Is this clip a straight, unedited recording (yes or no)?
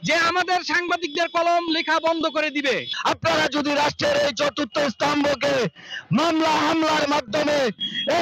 no